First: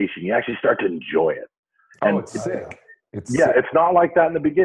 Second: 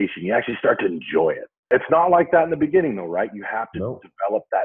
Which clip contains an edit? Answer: second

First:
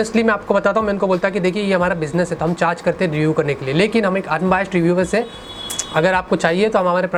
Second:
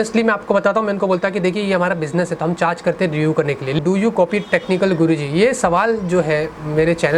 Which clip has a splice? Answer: second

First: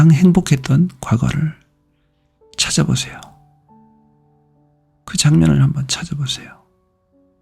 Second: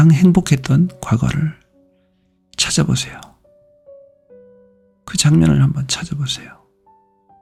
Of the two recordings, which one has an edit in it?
first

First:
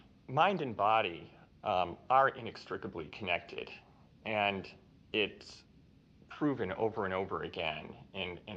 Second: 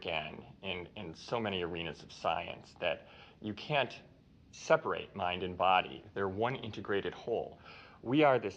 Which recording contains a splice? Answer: second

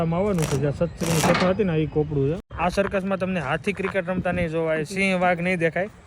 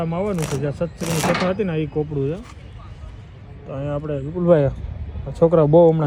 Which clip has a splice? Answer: first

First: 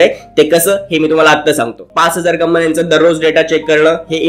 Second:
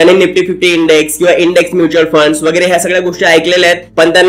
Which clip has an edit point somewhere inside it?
first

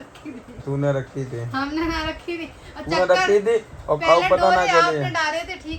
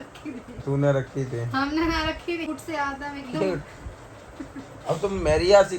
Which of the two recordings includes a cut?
second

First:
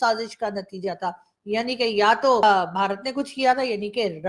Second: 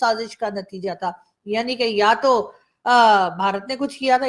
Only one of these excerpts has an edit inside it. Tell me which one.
first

